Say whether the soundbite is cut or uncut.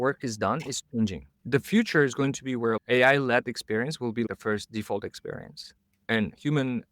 cut